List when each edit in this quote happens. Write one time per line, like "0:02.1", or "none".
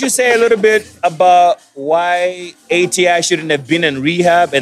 0:00.9
0:02.5